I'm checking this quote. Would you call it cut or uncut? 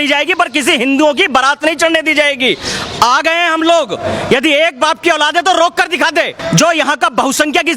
cut